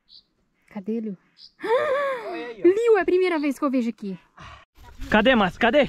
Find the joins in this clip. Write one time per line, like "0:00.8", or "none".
0:04.9

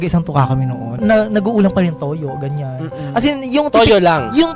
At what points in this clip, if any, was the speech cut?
0:01.0

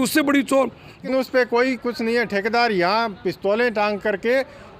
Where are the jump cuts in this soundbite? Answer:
0:01.0

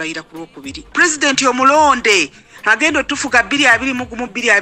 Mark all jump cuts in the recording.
0:00.9

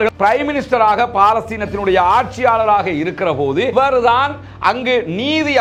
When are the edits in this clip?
none

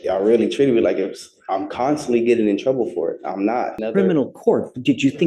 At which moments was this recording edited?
0:03.8

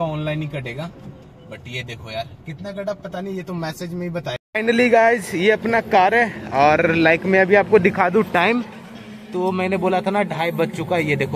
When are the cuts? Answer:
0:04.4

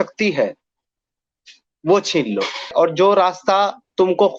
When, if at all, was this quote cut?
0:02.7

